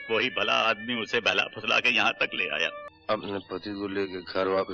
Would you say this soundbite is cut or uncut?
cut